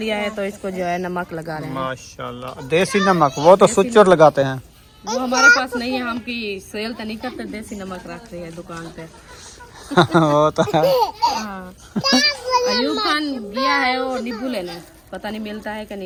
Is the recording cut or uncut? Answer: uncut